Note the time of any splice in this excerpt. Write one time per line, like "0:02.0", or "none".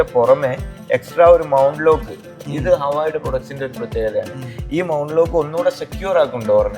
none